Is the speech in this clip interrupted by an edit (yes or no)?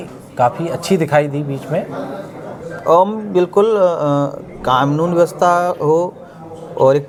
no